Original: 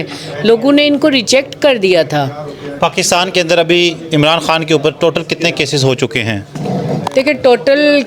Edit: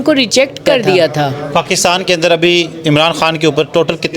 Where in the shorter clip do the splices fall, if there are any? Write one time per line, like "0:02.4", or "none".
0:01.4

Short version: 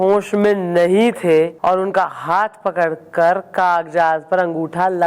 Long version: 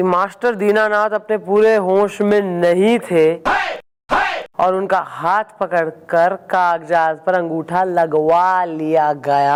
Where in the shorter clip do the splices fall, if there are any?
0:01.5

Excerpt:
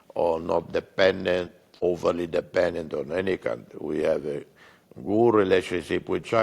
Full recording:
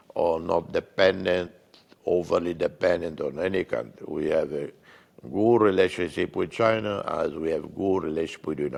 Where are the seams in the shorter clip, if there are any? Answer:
0:01.6

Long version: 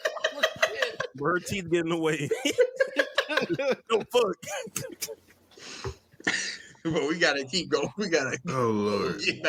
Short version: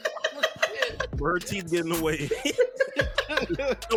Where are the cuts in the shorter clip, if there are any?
none

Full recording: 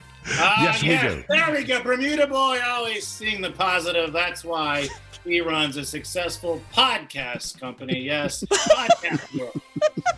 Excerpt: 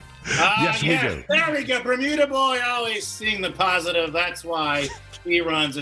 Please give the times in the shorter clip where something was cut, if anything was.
none

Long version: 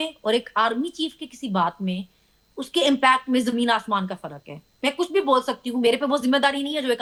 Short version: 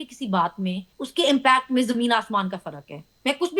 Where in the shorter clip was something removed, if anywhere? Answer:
0:00.9

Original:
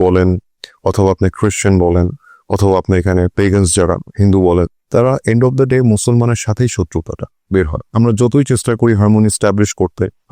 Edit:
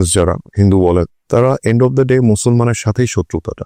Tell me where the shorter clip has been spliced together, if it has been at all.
none

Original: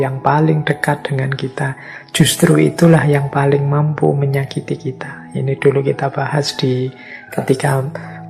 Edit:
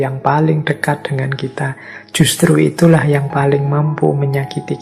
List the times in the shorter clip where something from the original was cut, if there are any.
none

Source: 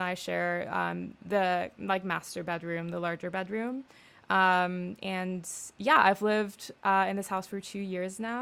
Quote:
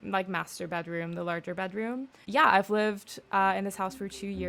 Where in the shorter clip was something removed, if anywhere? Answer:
0:02.1

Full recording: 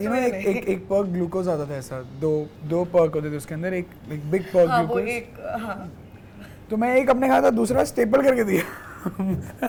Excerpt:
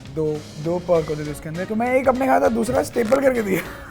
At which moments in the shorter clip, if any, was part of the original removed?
0:01.6

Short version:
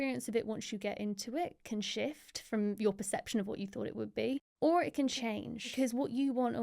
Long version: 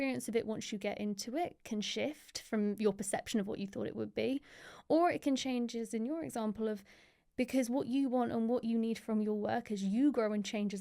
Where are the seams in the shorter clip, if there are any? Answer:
0:04.5
0:05.2

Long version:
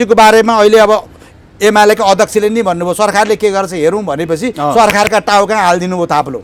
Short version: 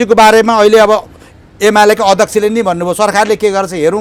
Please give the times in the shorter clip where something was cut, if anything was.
none

